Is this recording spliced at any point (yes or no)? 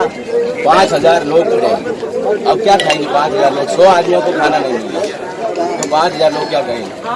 no